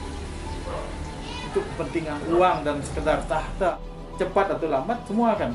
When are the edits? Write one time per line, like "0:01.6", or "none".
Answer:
0:03.7